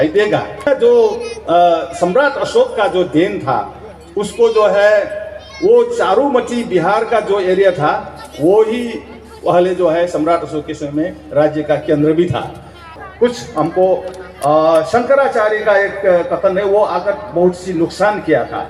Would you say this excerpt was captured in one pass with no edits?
no; 2 cuts; at 0.7 s, 12.9 s

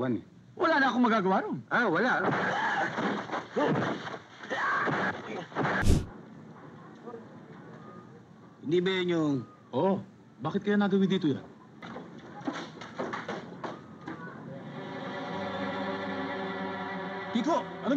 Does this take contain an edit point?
yes; 4 cuts; at 5.8 s, 8.0 s, 11.8 s, 15.0 s

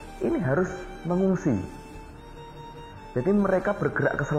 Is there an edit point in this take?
no; 0 cuts

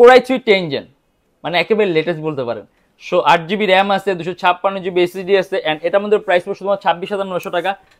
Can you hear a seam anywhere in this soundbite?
no; 0 cuts

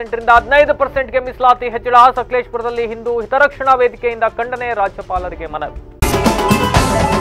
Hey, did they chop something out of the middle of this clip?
yes; 1 cut; at 5.8 s

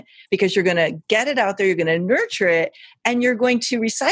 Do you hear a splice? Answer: no; 0 cuts

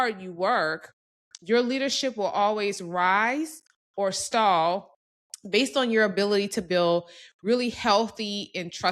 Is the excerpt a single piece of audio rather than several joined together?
yes; 0 cuts

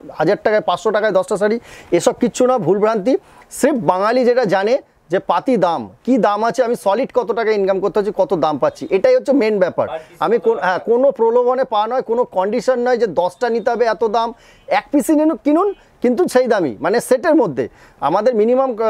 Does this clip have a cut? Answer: no; 0 cuts

